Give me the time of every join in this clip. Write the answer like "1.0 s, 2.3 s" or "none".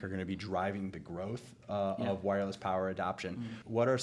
none